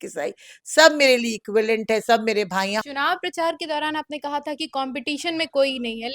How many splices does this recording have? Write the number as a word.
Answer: one